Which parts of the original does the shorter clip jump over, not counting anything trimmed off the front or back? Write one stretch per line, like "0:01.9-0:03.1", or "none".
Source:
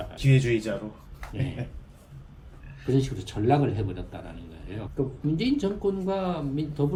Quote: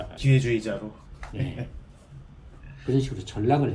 none

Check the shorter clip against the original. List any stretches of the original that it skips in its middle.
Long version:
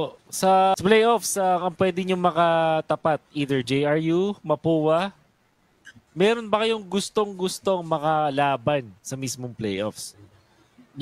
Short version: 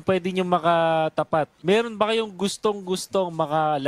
0:03.3-0:06.1

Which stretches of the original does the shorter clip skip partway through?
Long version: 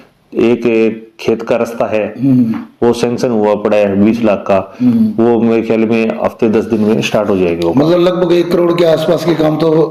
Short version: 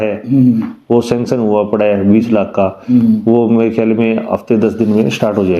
none

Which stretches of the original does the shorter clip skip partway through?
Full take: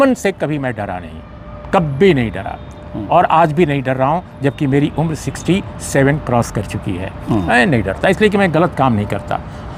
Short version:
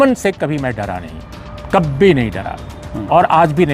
none

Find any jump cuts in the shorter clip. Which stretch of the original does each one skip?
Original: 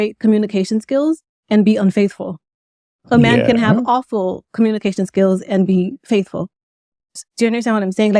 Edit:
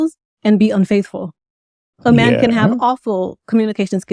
none

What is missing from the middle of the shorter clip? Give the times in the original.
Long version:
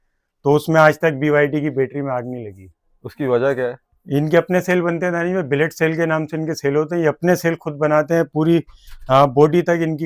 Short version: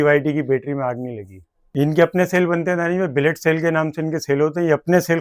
0:02.8-0:03.9

